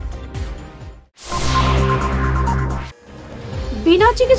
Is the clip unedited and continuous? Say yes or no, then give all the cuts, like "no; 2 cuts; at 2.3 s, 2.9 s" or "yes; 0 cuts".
no; 1 cut; at 2.6 s